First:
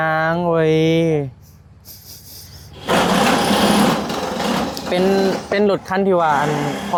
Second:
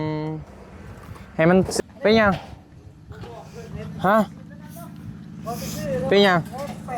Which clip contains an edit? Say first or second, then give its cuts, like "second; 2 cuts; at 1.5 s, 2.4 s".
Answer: second; 1 cut; at 1.7 s